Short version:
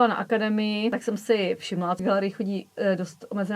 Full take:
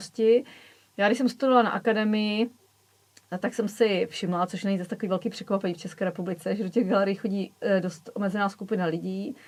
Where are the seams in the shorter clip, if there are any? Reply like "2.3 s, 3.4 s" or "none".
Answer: 0.9 s, 2.0 s